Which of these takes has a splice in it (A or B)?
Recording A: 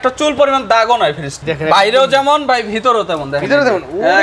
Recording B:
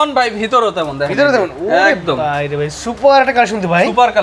A